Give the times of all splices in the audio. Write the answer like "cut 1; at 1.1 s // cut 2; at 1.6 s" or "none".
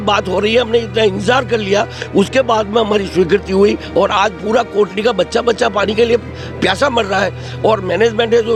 none